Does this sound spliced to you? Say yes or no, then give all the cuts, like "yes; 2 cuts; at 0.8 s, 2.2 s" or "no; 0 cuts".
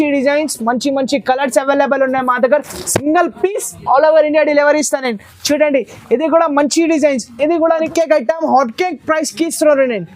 yes; 1 cut; at 7.9 s